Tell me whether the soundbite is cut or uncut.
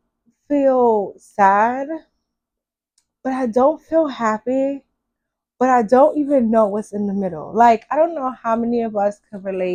uncut